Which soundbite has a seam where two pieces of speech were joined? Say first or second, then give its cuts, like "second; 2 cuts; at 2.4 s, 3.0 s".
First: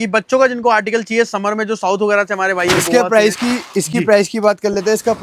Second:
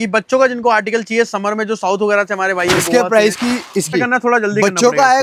second; 1 cut; at 3.9 s